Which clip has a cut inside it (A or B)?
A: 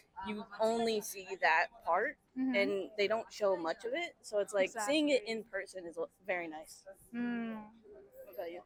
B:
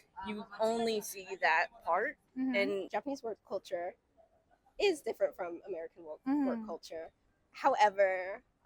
B